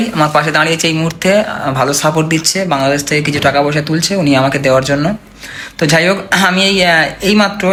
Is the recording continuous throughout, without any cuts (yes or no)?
yes